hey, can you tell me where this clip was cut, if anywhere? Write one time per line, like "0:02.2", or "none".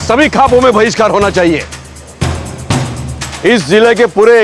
none